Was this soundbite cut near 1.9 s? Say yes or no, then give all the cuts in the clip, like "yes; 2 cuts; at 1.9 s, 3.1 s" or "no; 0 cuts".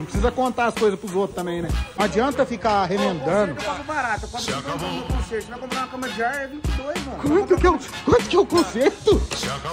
yes; 1 cut; at 1.9 s